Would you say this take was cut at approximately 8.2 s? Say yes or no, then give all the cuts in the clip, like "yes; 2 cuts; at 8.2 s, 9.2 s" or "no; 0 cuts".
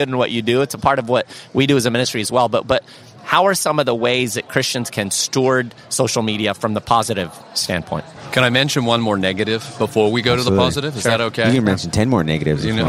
yes; 1 cut; at 8.2 s